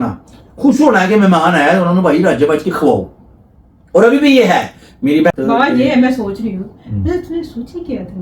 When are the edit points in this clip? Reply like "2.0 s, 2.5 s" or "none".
5.3 s